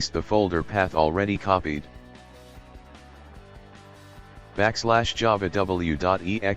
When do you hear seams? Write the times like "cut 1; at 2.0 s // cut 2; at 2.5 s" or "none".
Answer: cut 1; at 1.9 s // cut 2; at 4.6 s